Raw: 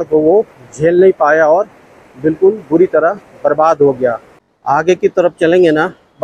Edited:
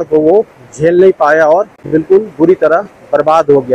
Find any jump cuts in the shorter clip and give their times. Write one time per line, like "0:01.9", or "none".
0:01.8